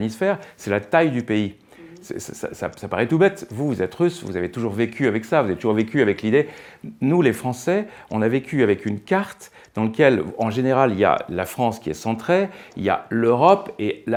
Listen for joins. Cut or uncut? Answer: uncut